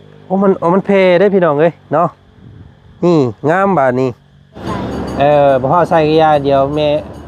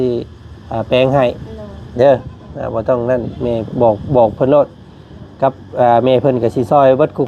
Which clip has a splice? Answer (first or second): first